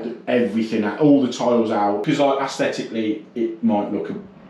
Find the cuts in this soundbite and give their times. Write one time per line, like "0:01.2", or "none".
0:02.0